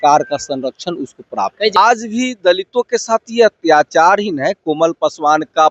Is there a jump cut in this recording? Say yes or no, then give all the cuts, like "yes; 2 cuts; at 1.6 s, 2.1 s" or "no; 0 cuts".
yes; 1 cut; at 1.8 s